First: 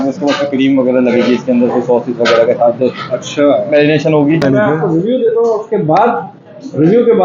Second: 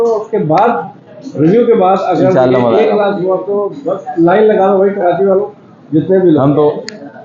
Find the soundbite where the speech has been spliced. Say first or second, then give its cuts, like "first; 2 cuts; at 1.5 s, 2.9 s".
first; 1 cut; at 4.4 s